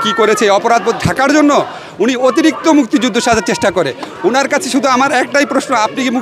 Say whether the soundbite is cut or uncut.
uncut